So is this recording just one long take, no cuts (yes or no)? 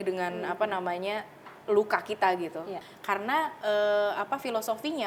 no